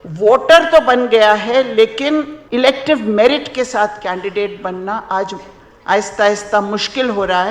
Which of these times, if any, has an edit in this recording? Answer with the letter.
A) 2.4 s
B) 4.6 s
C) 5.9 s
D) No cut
A